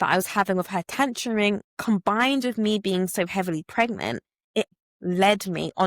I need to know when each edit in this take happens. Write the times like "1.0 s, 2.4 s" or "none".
4.7 s